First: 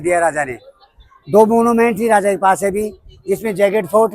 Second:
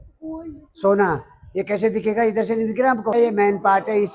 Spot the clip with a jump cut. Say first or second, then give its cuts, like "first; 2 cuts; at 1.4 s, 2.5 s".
second; 1 cut; at 3.1 s